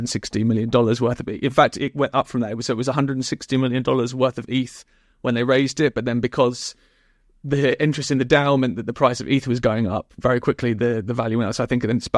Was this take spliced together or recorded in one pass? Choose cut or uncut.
uncut